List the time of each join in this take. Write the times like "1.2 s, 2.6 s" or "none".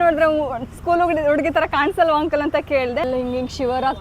3.0 s